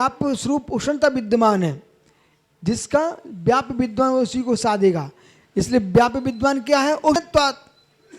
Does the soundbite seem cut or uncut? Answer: cut